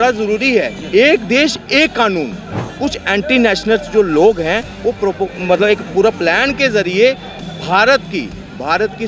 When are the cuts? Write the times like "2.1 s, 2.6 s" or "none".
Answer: 2.6 s